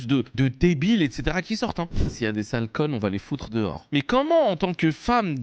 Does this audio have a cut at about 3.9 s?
yes; 2 cuts; at 2.0 s, 3.9 s

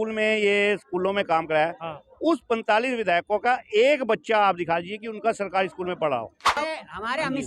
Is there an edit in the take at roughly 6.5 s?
yes; 1 cut; at 6.5 s

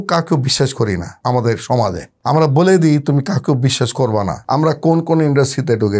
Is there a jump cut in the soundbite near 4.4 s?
yes; 1 cut; at 4.4 s

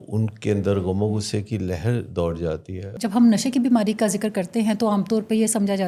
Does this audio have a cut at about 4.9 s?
no; 1 cut; at 2.9 s

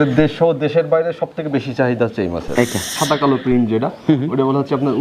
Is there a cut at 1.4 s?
no; 1 cut; at 3.0 s

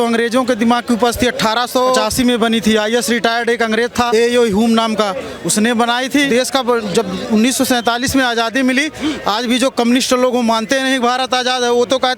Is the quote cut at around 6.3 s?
yes; 3 cuts; at 2.0 s, 4.1 s, 6.3 s

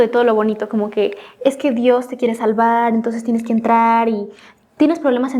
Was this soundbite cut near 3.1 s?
no; 0 cuts

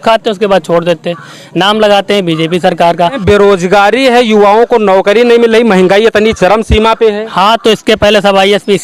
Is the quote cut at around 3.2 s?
yes; 1 cut; at 3.2 s

